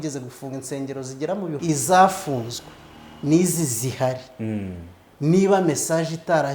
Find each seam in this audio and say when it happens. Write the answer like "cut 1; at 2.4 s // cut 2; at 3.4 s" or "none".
cut 1; at 1.6 s